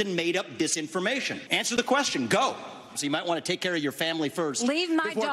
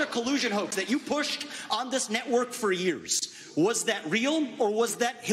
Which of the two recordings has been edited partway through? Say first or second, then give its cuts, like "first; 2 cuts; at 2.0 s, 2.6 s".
first; 2 cuts; at 1.4 s, 3.0 s